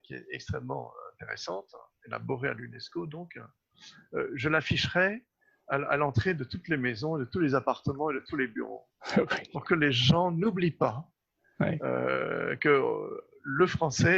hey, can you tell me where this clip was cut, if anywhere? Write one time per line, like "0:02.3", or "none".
none